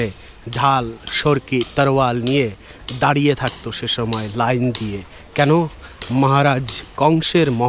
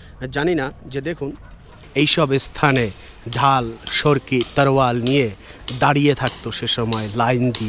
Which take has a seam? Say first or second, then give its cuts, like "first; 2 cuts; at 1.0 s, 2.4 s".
second; 1 cut; at 1.7 s